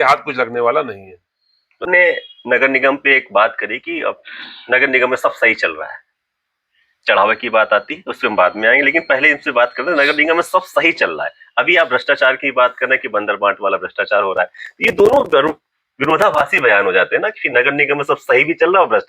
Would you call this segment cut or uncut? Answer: cut